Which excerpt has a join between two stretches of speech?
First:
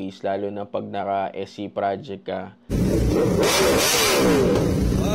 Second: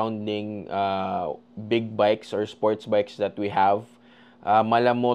first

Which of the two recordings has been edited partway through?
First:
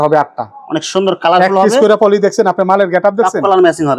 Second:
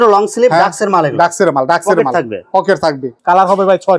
second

